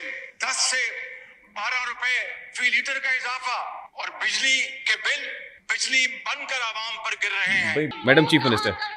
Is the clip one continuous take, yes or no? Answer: no